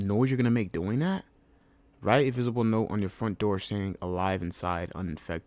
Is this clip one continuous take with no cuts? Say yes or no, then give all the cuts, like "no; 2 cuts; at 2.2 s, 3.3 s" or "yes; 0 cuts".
yes; 0 cuts